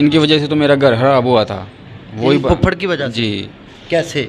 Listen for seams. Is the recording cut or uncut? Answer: uncut